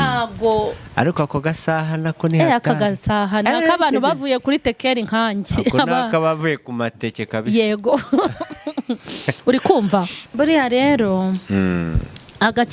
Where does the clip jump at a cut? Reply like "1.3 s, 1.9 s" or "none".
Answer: 10.2 s